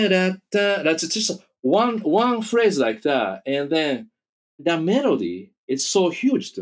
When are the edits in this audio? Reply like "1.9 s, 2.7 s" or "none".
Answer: 4.6 s, 5.5 s

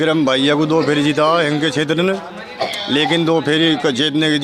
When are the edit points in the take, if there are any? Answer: none

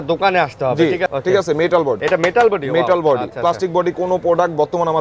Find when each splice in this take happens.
1.1 s, 2.0 s

